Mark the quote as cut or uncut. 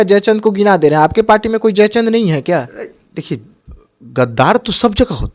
uncut